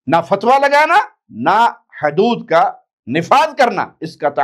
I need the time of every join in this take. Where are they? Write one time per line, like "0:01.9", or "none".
none